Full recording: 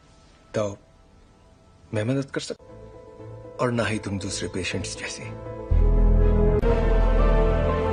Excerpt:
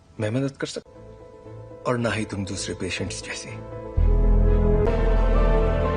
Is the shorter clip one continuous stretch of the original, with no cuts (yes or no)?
no